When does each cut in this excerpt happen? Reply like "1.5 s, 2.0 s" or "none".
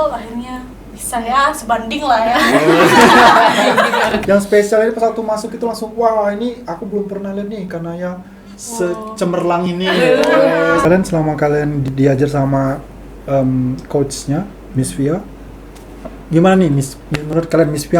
4.2 s, 10.9 s